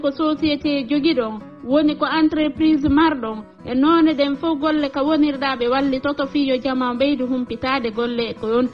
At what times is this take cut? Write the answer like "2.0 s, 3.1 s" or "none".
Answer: none